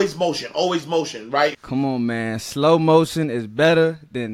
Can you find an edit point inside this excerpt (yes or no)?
yes